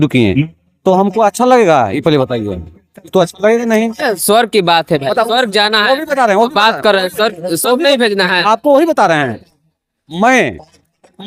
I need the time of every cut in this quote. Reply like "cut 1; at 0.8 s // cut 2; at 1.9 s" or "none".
none